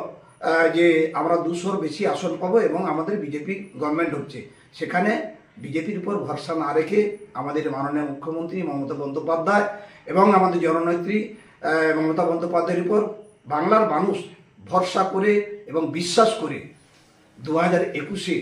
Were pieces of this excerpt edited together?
no; 0 cuts

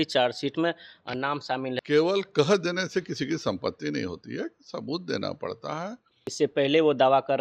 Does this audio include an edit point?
yes; 2 cuts; at 1.8 s, 6.3 s

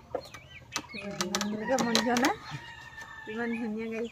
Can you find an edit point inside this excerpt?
no; 0 cuts

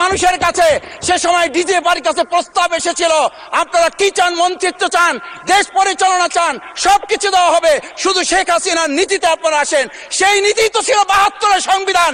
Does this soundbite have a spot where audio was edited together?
no; 0 cuts

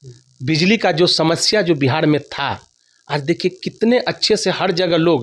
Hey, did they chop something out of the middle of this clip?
no; 0 cuts

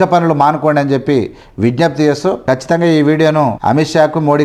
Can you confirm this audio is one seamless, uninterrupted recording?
yes; 0 cuts

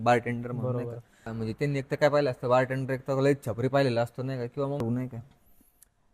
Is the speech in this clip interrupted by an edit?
yes; 1 cut; at 4.8 s

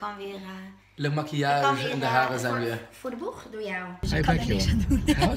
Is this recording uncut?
no; 1 cut; at 4.0 s

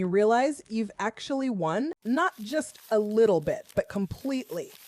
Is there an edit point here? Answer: yes; 1 cut; at 2.0 s

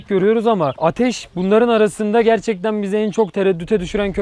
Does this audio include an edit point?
no; 0 cuts

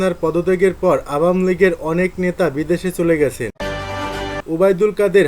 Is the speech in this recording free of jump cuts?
no; 1 cut; at 4.0 s

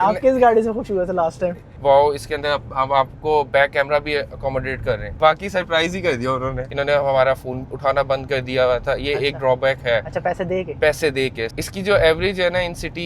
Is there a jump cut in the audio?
yes; 4 cuts; at 1.7 s, 5.1 s, 6.6 s, 11.4 s

